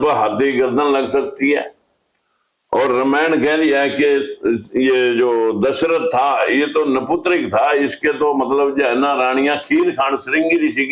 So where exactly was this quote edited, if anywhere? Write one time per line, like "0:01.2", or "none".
none